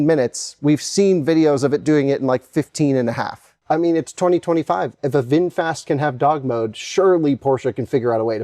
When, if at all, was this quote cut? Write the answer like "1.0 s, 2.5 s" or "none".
3.5 s